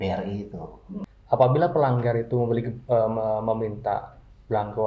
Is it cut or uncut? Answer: cut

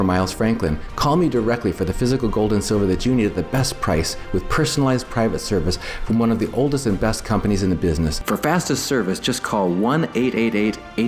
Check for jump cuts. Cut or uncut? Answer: cut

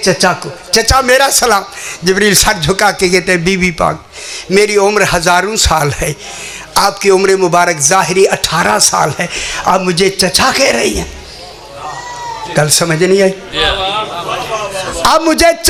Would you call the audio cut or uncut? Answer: uncut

